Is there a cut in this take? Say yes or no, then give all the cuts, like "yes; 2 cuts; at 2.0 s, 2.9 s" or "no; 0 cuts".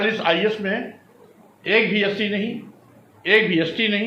no; 0 cuts